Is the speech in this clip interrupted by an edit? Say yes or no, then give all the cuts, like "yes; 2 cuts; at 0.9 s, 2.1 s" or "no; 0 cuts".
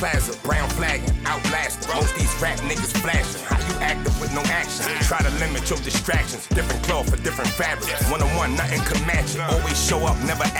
no; 0 cuts